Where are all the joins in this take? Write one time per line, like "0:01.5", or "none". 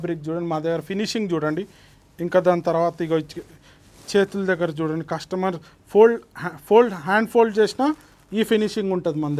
none